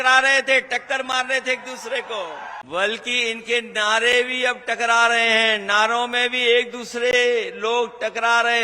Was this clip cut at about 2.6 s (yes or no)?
yes